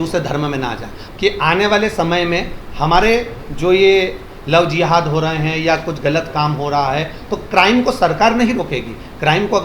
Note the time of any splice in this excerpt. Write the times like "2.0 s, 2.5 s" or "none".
1.0 s